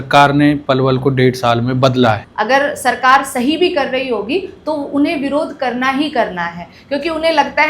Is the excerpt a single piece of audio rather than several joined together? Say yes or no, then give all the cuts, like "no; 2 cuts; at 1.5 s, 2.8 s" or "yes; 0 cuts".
no; 1 cut; at 2.3 s